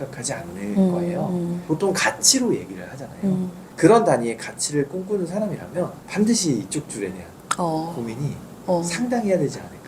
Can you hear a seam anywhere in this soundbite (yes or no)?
yes